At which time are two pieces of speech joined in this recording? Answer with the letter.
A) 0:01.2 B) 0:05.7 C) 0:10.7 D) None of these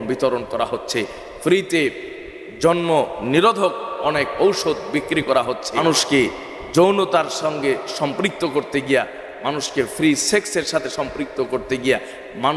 B